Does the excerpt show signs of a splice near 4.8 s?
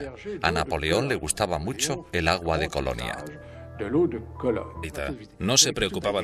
no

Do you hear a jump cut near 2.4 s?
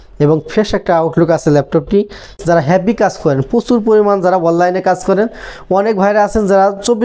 yes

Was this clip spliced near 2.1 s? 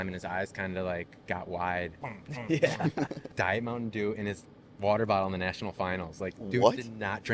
yes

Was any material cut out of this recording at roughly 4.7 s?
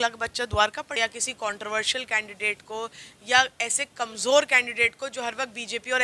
no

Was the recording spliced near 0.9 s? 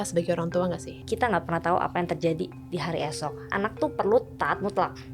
yes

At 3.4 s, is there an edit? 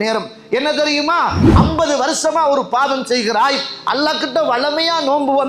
no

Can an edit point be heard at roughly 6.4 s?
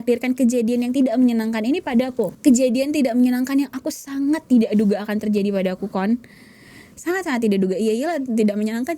no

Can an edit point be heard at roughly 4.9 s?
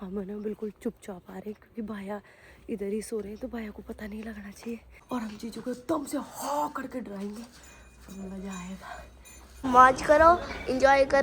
yes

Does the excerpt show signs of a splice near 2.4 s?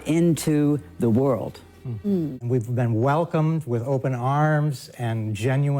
yes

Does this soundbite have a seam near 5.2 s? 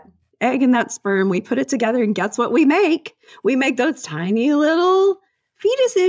no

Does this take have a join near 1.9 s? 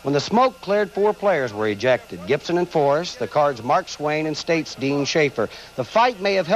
yes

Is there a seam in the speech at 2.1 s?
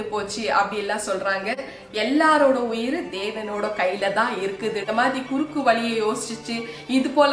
no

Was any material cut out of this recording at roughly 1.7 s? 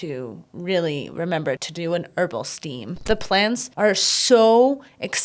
yes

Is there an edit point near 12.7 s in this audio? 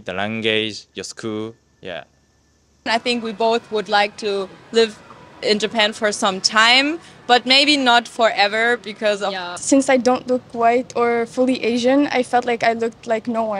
no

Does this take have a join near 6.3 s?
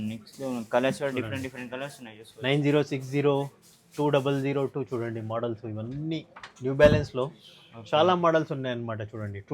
no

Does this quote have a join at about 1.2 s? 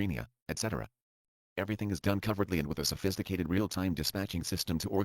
no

